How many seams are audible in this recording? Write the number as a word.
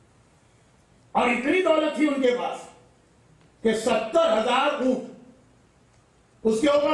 zero